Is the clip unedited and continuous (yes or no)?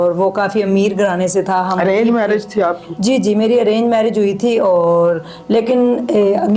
yes